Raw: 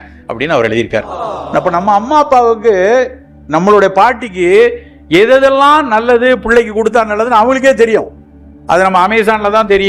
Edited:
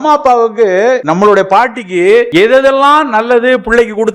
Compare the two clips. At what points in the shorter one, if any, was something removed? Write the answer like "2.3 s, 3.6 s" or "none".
1.0 s, 2.3 s

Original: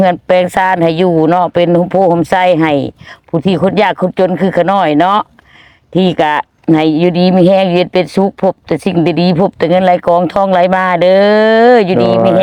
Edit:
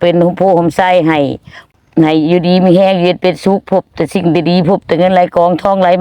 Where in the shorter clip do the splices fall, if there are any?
1.8 s

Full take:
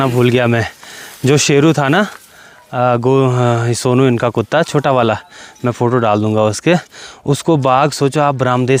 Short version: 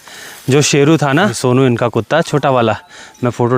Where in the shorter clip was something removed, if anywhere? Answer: 1.4 s

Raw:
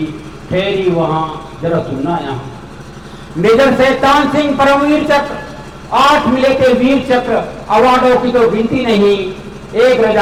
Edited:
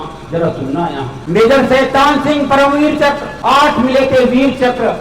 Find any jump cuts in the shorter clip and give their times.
1.1 s, 3.3 s

